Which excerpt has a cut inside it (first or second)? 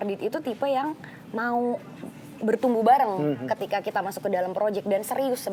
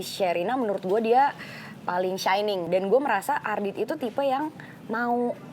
second